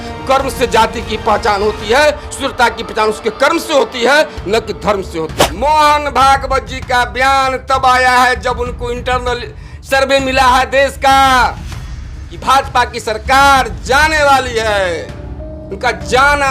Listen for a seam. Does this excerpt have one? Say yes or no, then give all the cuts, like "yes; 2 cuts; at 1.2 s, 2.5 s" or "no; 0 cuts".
yes; 1 cut; at 5.5 s